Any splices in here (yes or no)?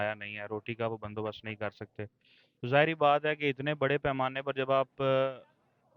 no